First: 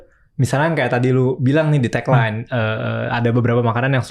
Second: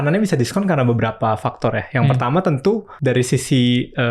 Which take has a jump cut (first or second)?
second